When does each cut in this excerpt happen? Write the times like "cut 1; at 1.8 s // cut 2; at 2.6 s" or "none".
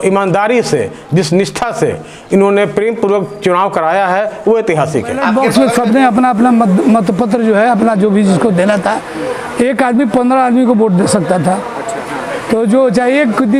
cut 1; at 5.3 s